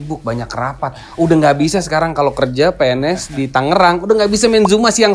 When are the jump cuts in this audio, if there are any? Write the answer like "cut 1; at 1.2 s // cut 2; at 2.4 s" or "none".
none